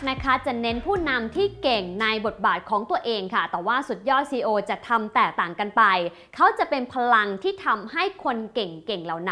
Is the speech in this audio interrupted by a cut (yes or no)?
no